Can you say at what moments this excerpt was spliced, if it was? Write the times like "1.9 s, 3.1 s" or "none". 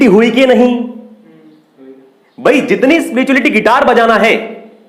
none